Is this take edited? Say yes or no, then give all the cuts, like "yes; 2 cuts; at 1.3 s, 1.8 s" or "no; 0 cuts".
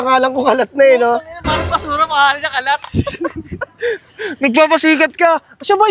no; 0 cuts